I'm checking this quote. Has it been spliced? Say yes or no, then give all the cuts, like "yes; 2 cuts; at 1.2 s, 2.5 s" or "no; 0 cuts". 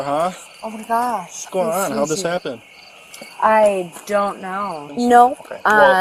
yes; 2 cuts; at 1.4 s, 4.9 s